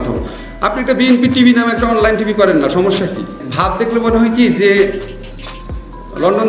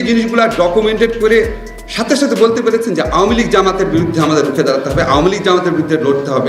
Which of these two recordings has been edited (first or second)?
first